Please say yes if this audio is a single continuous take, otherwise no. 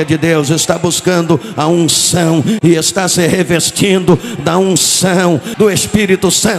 no